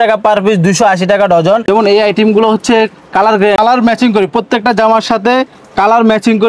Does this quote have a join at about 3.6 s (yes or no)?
yes